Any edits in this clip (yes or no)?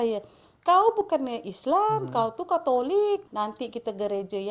yes